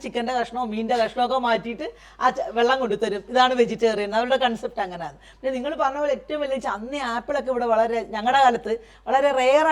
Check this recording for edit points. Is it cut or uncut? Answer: uncut